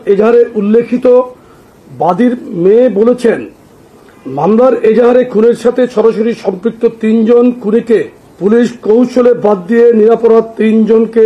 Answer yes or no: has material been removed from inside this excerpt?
no